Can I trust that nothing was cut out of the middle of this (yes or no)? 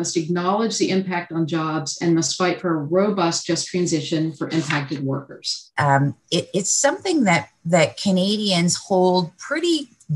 no